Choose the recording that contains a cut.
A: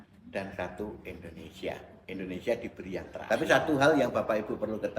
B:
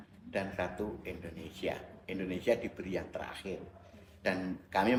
A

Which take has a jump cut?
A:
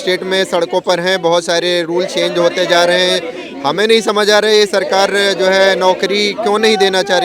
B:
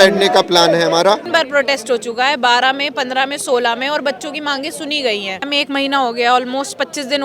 B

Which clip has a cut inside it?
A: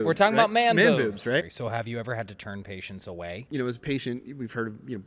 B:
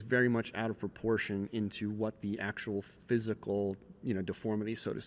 A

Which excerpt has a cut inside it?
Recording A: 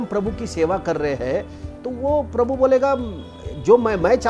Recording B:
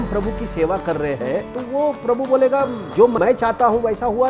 B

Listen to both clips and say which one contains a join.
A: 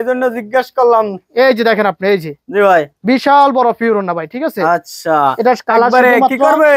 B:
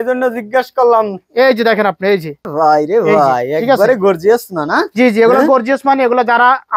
B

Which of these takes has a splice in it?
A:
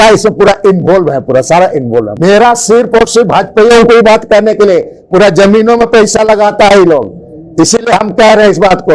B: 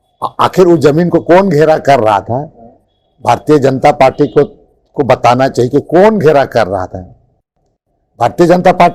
A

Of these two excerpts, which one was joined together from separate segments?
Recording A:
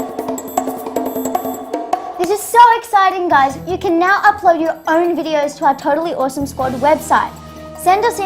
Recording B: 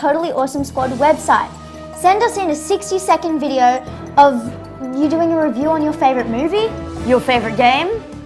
A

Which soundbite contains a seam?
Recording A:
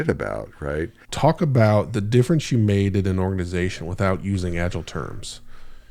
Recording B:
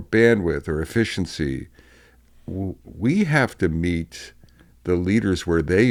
A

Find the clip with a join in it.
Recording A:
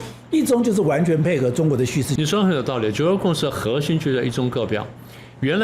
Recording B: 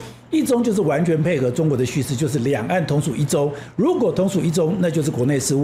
A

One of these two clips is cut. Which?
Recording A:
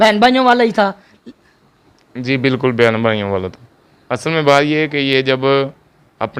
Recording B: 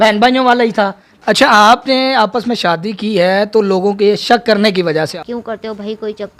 B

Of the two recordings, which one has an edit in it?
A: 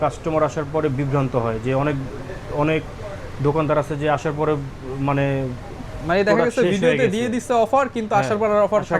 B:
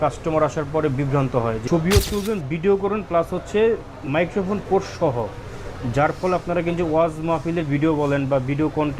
B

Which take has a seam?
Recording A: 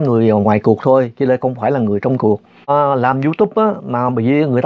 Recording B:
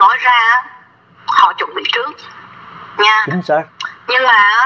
A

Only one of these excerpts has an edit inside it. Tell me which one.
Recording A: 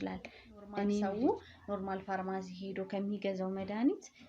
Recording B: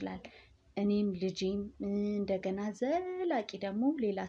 A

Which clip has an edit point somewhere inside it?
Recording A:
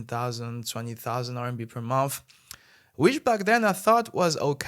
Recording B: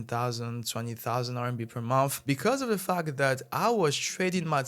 B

